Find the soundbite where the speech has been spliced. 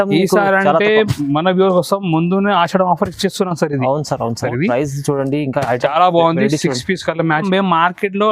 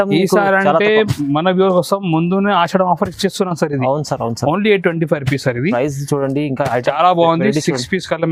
first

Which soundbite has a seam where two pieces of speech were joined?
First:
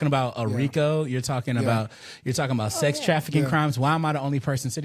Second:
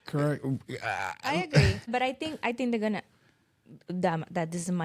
second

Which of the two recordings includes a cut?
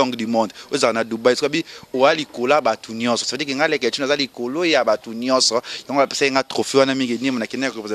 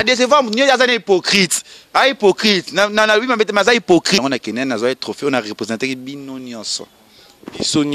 second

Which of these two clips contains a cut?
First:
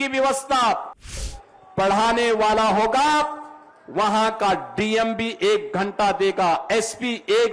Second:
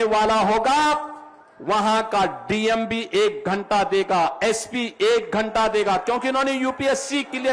first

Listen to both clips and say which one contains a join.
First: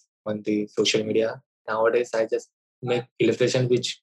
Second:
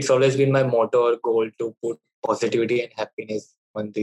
first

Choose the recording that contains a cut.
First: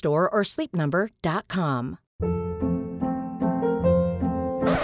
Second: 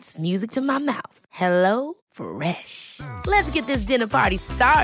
first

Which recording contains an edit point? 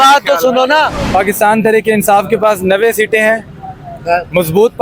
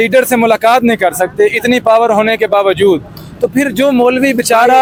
first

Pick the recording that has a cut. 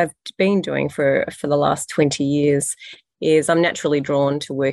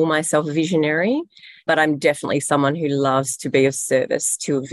second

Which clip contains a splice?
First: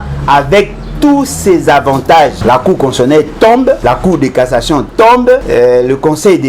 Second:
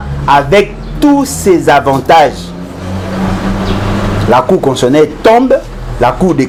first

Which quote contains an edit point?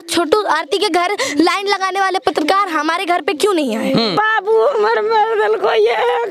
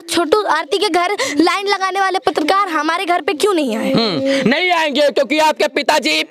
first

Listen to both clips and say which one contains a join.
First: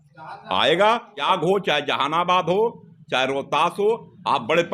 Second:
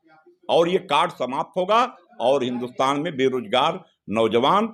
first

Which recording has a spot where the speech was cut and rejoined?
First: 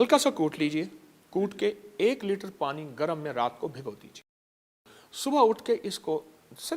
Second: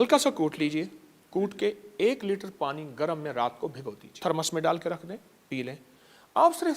second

